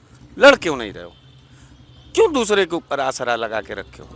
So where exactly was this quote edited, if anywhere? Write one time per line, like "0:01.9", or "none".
none